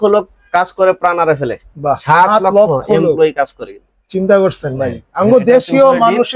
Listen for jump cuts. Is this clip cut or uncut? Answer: uncut